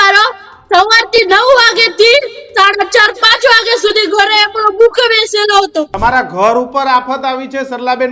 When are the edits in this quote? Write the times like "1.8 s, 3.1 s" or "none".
5.9 s